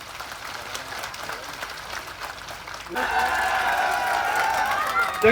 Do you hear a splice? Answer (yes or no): yes